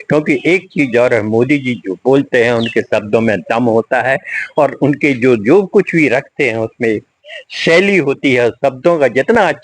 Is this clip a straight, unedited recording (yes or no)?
yes